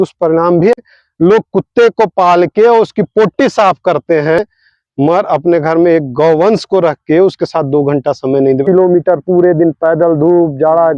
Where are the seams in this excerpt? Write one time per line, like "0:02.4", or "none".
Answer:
0:00.8
0:04.4
0:08.7

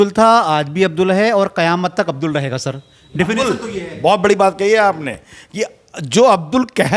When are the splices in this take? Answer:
none

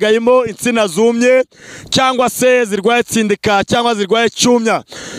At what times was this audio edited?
none

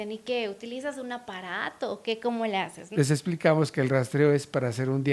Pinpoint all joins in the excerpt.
0:02.8

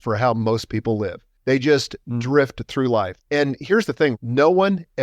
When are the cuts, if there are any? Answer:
0:01.3
0:03.1

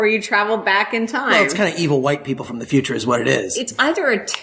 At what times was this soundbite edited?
0:01.3
0:03.5

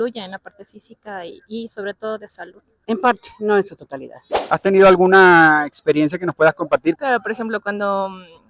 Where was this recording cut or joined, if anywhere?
0:02.8
0:04.4
0:07.0

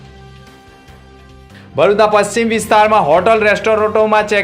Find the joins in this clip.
0:01.5

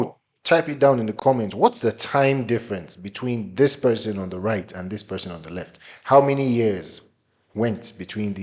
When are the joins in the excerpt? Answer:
none

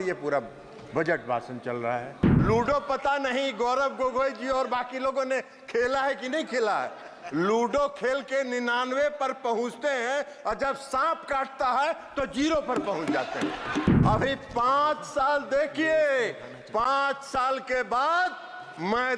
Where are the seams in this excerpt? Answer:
0:02.3
0:13.9

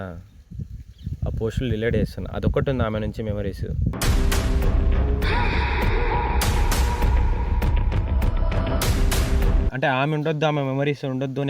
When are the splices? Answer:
0:09.7

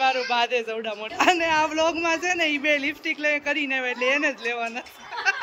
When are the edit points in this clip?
0:01.1

